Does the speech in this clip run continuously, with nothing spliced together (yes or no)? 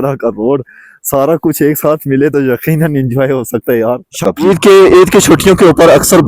no